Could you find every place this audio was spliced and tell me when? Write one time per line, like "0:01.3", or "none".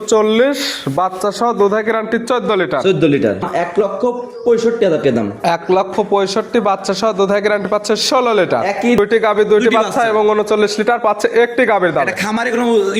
0:03.4
0:09.0